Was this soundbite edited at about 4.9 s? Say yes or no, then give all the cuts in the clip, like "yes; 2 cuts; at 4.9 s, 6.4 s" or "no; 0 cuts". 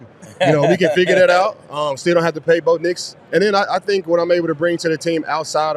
no; 1 cut; at 3.2 s